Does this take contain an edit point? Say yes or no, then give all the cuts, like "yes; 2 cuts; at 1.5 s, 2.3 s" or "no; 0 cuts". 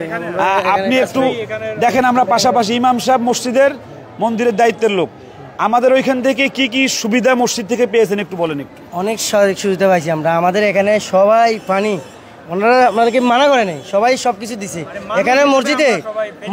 no; 0 cuts